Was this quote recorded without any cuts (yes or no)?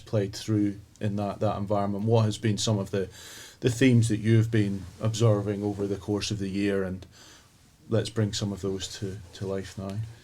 yes